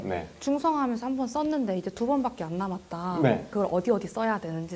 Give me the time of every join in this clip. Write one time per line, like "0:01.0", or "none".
0:03.5